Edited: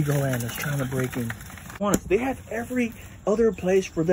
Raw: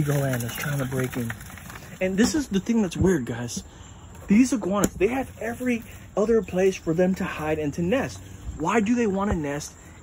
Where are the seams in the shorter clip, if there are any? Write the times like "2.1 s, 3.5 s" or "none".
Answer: 1.8 s